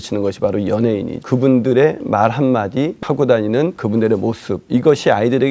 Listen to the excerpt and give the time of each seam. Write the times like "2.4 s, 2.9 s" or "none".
1.2 s, 3.0 s, 3.8 s